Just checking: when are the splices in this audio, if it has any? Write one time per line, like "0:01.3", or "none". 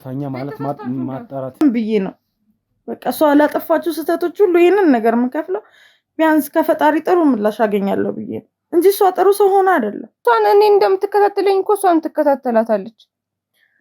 0:01.6
0:10.2